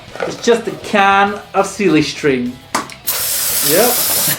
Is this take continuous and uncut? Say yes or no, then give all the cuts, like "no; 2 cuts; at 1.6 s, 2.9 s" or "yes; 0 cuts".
no; 1 cut; at 1.4 s